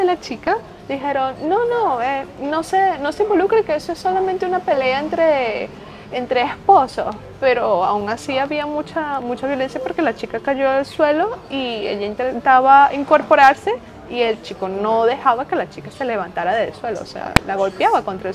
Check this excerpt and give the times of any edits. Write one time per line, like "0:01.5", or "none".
none